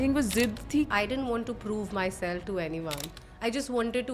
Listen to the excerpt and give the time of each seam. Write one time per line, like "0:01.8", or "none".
0:00.9